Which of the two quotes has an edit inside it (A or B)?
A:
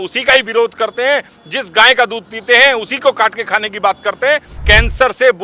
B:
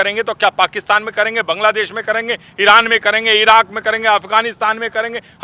A